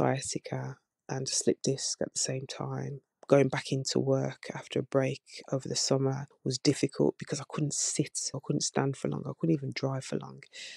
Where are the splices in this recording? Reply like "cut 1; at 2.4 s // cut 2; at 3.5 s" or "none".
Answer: cut 1; at 6.3 s // cut 2; at 8.3 s